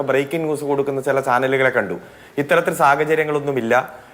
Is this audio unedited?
yes; 0 cuts

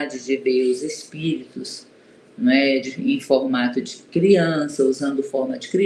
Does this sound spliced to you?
no; 0 cuts

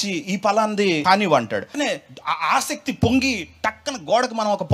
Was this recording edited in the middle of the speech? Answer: yes; 2 cuts; at 1.0 s, 1.7 s

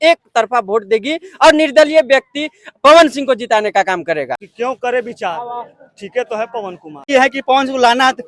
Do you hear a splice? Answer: yes; 2 cuts; at 4.5 s, 7.0 s

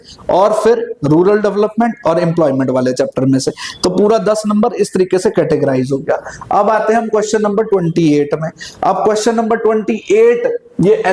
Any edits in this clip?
no; 0 cuts

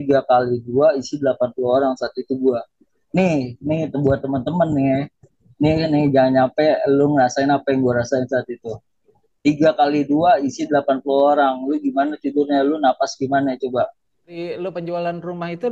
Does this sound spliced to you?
yes; 1 cut; at 14.4 s

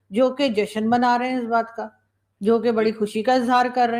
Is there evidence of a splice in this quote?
no; 0 cuts

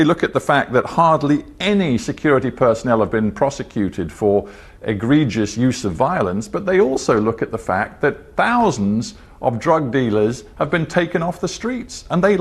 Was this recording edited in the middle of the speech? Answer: no; 0 cuts

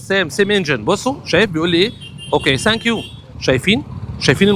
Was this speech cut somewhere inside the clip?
no; 0 cuts

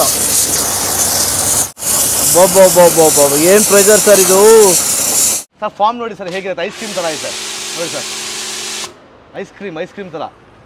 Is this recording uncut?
no; 1 cut; at 5.5 s

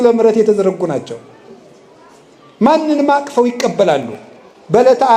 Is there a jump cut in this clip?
no; 0 cuts

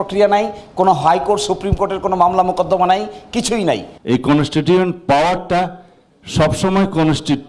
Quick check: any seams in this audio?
yes; 1 cut; at 3.9 s

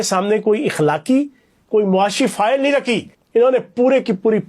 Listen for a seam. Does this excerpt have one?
yes; 1 cut; at 3.1 s

